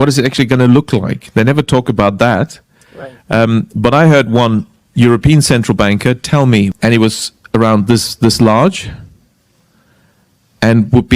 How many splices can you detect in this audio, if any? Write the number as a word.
one